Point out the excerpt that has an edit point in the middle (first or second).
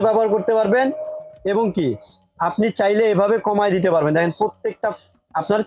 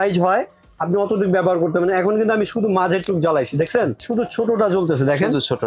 second